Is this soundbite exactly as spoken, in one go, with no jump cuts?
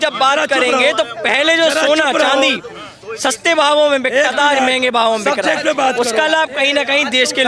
yes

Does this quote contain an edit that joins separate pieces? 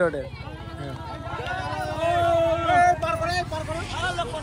no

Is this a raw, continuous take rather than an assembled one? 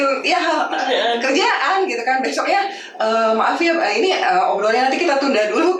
yes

